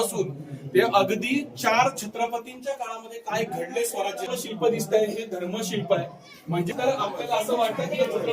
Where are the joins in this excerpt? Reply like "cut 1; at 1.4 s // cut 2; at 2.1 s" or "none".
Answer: cut 1; at 4.2 s // cut 2; at 6.7 s